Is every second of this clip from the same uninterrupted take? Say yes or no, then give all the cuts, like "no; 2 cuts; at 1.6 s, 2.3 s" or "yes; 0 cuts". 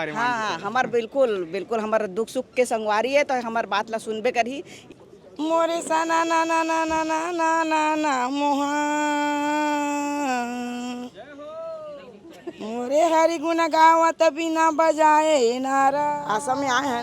no; 2 cuts; at 4.8 s, 16.1 s